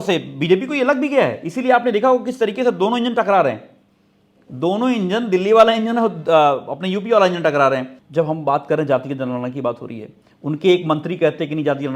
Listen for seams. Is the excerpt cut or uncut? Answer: cut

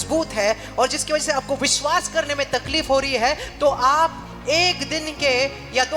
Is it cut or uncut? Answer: uncut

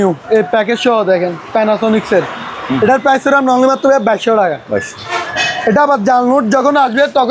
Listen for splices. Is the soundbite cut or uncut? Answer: cut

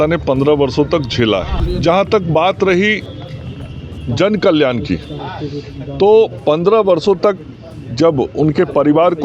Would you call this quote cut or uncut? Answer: cut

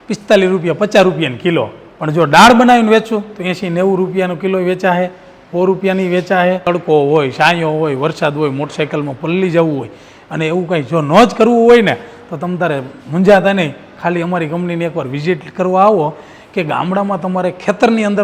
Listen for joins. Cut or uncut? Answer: cut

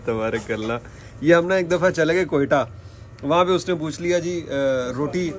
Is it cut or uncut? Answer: uncut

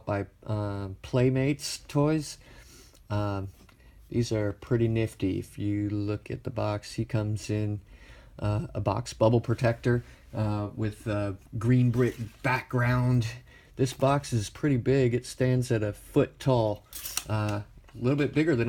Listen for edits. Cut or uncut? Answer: cut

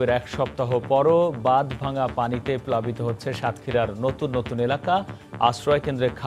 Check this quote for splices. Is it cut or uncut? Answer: uncut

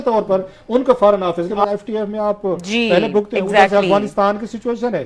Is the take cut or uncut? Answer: cut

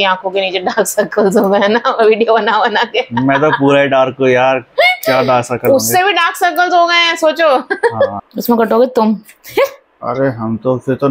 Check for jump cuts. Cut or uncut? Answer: cut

